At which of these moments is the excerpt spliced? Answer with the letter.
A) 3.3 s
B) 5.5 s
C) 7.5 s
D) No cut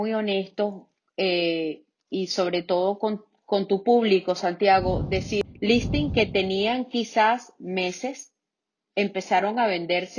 B